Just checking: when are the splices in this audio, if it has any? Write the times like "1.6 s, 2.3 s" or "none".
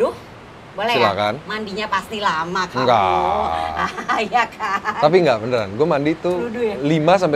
none